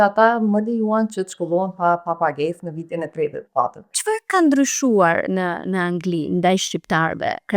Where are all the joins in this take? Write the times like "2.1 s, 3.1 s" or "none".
3.9 s